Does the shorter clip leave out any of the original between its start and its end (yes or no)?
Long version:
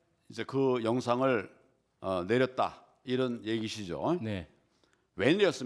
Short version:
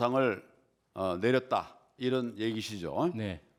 no